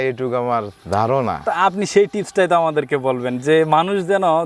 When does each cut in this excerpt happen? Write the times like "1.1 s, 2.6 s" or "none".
none